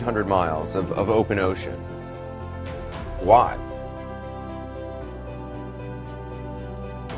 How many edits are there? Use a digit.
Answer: 1